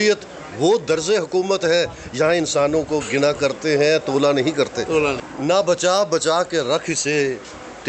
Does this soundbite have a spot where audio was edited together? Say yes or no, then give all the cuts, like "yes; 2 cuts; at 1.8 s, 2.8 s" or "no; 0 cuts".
yes; 1 cut; at 5.2 s